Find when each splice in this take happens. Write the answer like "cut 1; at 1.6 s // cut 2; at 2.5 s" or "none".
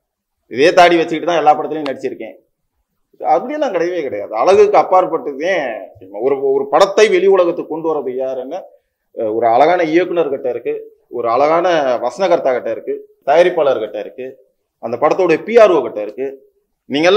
cut 1; at 13.1 s